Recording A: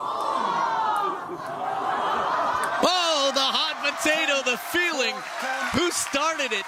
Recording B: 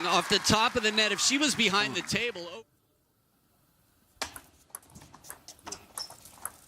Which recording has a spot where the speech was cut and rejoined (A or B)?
B